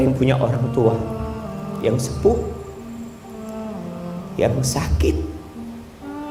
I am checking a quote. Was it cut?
no; 0 cuts

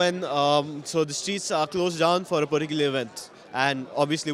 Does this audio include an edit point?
no; 0 cuts

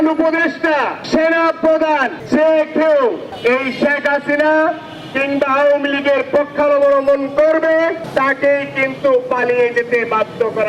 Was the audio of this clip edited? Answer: yes; 4 cuts; at 1.0 s, 2.2 s, 3.3 s, 8.0 s

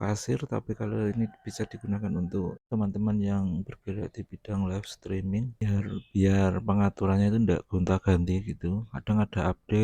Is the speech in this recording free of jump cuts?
yes; 0 cuts

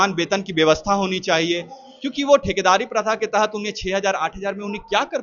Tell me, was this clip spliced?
no; 0 cuts

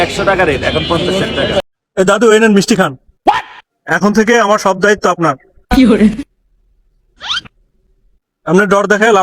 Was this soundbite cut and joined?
yes; 1 cut; at 1.7 s

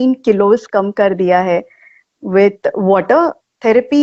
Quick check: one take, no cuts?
yes; 0 cuts

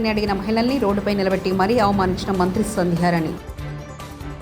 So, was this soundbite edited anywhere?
no; 0 cuts

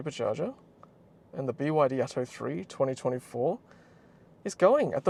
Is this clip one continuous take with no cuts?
yes; 0 cuts

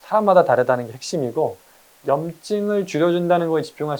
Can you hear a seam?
no; 0 cuts

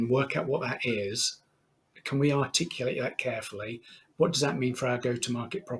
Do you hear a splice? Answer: yes; 1 cut; at 2.0 s

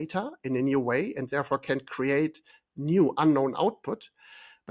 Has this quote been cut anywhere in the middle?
no; 0 cuts

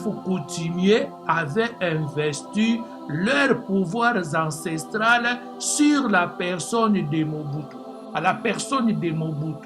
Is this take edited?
no; 0 cuts

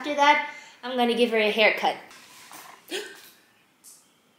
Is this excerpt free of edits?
no; 1 cut; at 2.0 s

